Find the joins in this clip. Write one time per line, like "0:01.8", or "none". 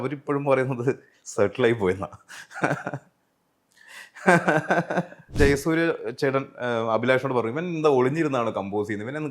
0:05.3